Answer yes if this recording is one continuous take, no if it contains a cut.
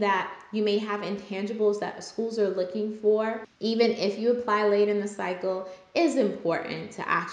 no